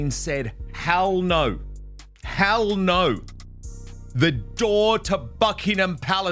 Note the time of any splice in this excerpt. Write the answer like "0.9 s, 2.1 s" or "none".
none